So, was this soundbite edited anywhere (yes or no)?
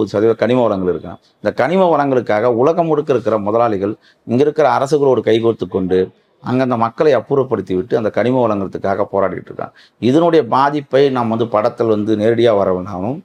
no